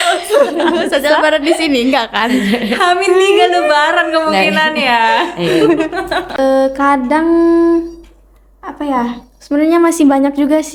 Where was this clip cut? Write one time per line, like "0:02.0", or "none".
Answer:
0:06.3

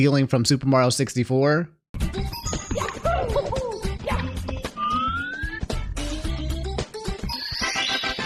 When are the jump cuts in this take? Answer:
none

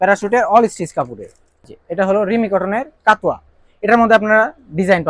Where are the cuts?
0:01.5

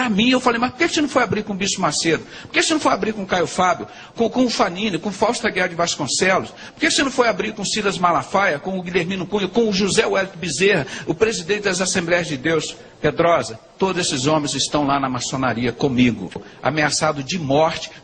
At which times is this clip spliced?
0:16.4

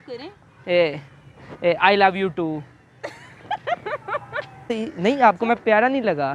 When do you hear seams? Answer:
0:04.7

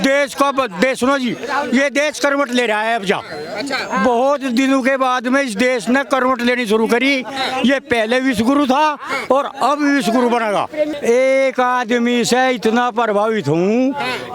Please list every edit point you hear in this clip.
0:11.0

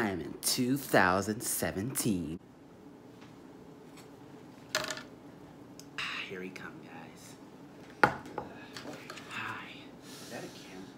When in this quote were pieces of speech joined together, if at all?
0:02.3

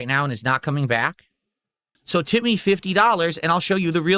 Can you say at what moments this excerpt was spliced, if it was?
0:01.9

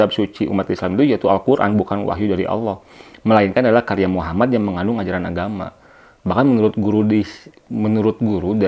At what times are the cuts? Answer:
none

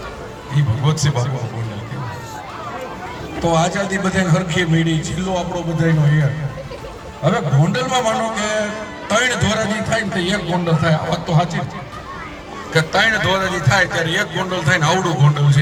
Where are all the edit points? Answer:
none

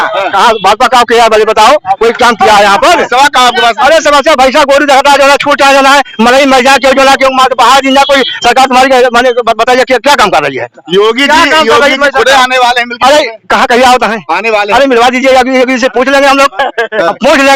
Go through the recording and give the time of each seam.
none

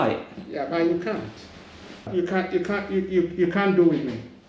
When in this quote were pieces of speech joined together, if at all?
0:02.1

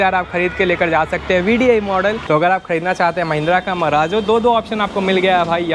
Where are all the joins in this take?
0:02.2

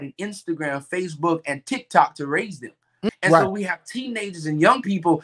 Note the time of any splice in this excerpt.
0:03.1

